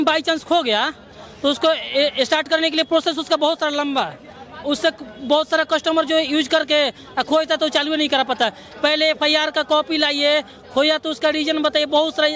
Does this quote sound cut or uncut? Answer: uncut